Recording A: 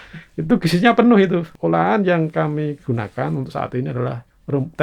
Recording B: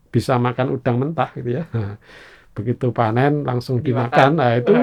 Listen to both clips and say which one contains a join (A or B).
A